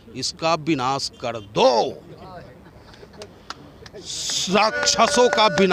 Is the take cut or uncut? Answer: uncut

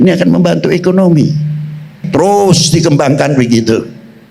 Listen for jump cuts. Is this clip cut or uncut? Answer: cut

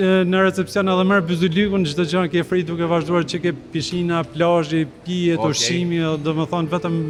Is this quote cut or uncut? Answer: uncut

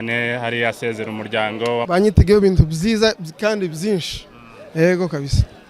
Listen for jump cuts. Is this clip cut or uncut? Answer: cut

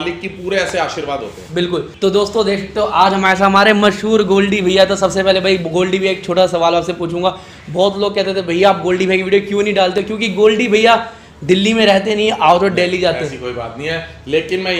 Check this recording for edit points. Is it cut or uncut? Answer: cut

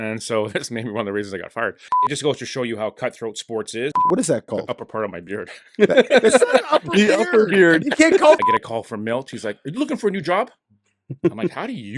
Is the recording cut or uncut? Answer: cut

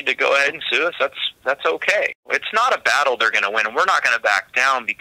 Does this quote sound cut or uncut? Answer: cut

